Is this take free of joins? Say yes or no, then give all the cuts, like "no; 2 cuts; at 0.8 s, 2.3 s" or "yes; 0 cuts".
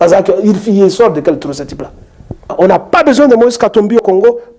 no; 1 cut; at 2.5 s